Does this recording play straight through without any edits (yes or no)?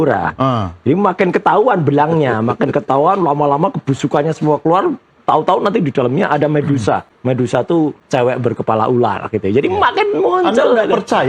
no